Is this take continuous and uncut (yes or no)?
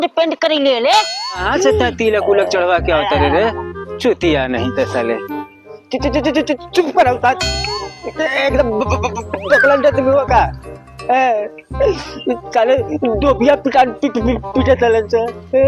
no